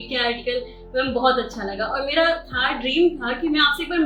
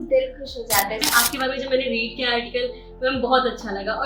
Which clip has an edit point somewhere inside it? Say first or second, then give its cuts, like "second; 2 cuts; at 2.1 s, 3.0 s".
second; 1 cut; at 1.1 s